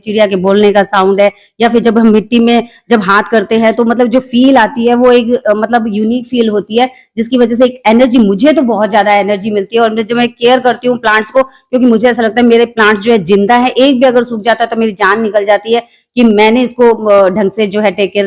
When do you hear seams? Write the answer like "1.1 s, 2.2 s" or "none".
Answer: none